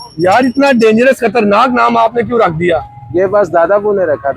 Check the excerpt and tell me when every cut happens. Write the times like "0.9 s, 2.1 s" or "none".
none